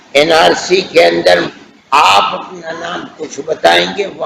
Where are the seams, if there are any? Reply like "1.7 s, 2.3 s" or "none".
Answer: 1.5 s